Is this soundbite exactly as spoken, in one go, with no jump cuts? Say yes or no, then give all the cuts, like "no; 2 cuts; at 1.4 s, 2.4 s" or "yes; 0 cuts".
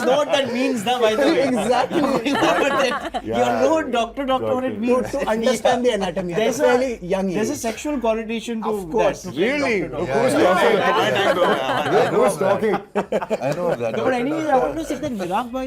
yes; 0 cuts